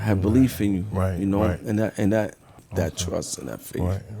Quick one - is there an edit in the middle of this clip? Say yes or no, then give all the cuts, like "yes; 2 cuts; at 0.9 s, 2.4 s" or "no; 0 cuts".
yes; 1 cut; at 2.6 s